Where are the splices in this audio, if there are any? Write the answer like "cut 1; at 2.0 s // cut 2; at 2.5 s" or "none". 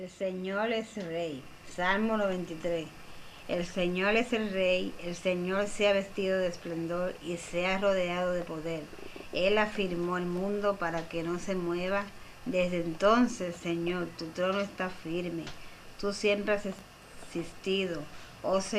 cut 1; at 8.8 s